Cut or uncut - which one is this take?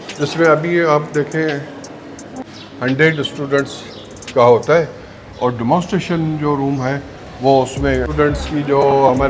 cut